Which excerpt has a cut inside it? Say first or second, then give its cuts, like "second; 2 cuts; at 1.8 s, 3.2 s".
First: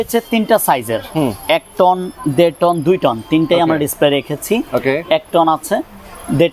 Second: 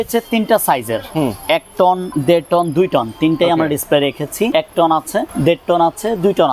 second; 3 cuts; at 2.1 s, 4.5 s, 5.3 s